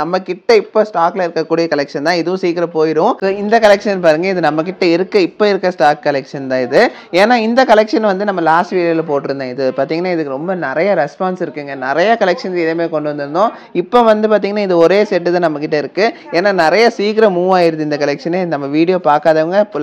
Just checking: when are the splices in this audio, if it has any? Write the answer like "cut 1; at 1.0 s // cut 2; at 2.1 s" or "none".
none